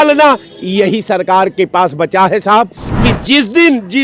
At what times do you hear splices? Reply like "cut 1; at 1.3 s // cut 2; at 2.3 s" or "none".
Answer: cut 1; at 2.9 s